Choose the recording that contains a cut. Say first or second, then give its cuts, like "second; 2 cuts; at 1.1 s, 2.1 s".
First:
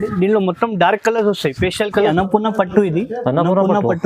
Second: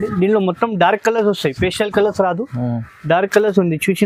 first; 1 cut; at 2.1 s